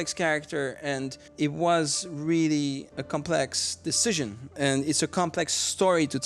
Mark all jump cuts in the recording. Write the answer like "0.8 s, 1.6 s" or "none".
1.2 s, 2.9 s, 4.5 s